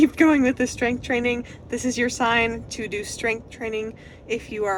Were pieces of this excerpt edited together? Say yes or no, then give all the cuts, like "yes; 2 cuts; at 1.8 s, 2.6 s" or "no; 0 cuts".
no; 0 cuts